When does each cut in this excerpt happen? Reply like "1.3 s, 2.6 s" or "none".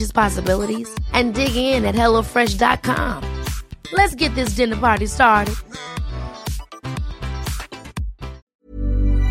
8.4 s